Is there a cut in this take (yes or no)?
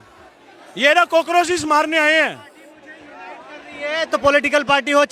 no